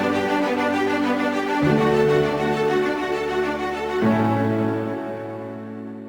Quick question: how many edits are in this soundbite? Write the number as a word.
zero